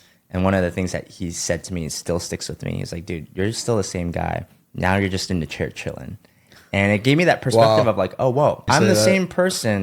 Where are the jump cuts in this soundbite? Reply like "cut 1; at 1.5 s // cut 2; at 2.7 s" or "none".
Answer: cut 1; at 8.6 s